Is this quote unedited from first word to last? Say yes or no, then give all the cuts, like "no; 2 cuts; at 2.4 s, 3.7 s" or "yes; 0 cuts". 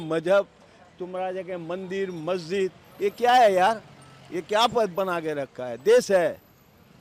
yes; 0 cuts